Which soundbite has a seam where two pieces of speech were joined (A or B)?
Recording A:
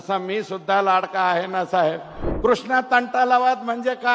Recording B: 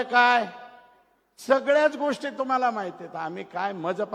A